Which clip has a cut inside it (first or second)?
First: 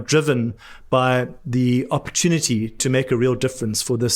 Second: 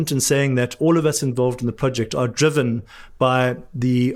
first